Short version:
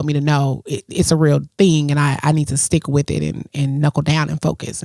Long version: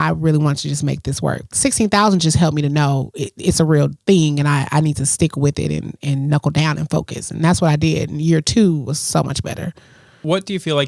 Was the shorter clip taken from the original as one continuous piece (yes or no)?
yes